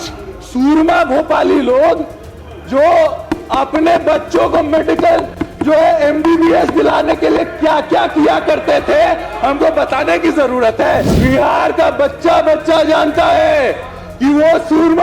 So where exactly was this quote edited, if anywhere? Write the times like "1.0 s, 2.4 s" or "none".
11.1 s